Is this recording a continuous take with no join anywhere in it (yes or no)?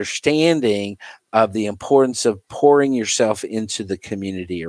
yes